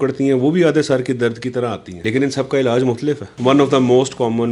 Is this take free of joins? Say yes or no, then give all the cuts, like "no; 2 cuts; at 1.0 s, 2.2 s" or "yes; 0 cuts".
no; 2 cuts; at 1.9 s, 3.3 s